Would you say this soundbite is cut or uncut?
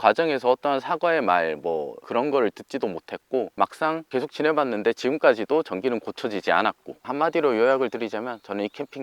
cut